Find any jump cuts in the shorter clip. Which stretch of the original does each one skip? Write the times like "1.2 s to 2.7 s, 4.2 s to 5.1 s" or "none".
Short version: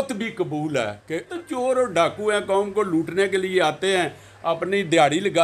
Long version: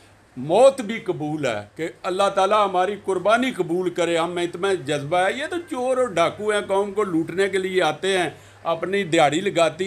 2.0 s to 5.5 s